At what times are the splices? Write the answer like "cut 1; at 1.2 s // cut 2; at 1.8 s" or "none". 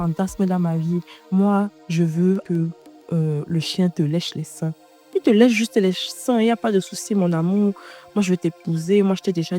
cut 1; at 2.5 s